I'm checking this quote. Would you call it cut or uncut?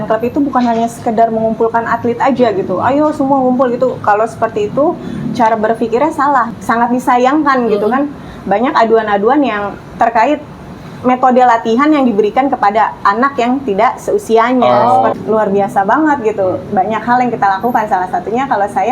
cut